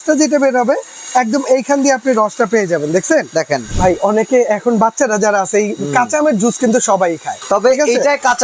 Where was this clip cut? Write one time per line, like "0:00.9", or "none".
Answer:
0:03.7
0:07.3